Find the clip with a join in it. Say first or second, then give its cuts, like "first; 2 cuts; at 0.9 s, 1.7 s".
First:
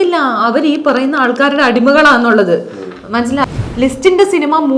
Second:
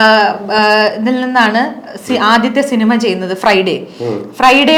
first; 1 cut; at 3.5 s